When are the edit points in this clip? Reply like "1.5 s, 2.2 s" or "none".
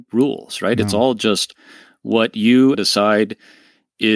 2.7 s

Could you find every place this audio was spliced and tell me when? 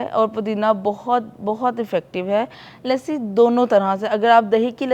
2.7 s

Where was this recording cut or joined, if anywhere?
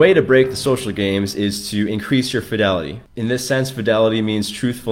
3.0 s

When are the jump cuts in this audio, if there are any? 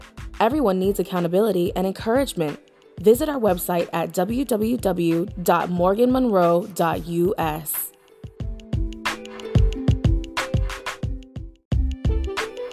11.5 s

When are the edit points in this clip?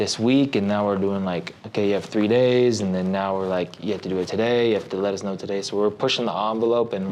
none

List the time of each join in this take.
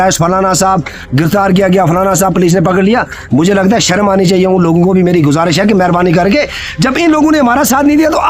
none

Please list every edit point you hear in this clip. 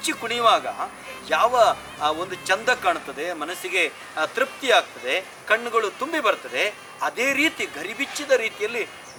none

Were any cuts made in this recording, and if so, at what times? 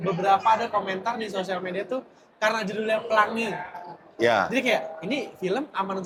none

